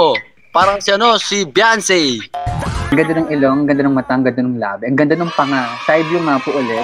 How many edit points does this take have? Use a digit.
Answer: 1